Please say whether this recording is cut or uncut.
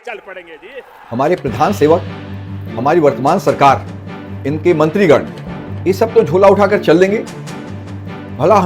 cut